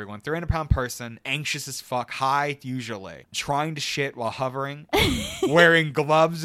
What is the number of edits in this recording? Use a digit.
1